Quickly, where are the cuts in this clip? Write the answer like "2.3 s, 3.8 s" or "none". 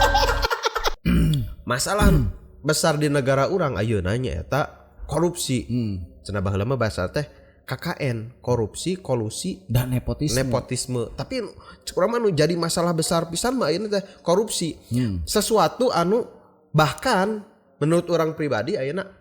1.0 s